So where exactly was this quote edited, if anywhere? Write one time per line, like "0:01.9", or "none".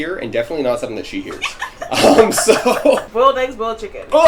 0:03.1